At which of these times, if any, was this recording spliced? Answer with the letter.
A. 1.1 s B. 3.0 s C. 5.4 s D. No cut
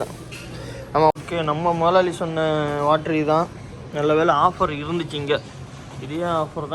A